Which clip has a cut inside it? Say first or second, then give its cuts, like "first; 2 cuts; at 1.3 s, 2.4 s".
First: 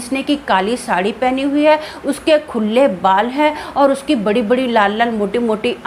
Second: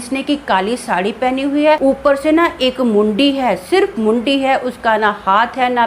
second; 1 cut; at 1.8 s